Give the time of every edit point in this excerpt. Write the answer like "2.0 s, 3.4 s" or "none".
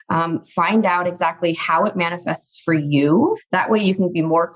3.4 s